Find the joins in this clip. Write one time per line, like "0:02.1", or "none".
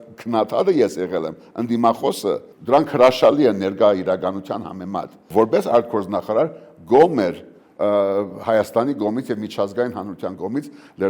0:02.5
0:05.2

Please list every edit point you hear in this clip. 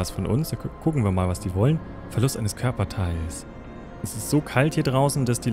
0:04.1

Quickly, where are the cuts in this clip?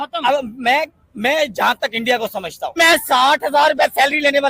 0:02.7

